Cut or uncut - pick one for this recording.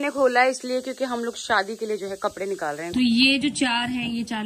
cut